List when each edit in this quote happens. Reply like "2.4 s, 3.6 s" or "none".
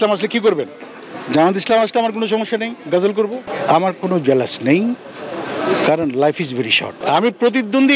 3.4 s, 7.0 s